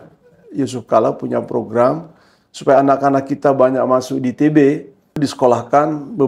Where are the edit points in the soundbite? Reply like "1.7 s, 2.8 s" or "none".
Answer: 5.2 s

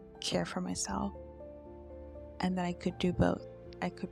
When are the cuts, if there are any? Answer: none

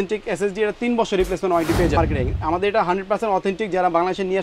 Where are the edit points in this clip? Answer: 2.0 s

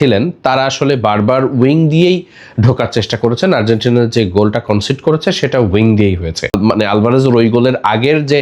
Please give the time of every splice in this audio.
6.5 s

